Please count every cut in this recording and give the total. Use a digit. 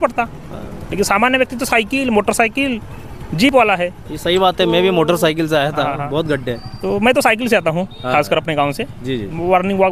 0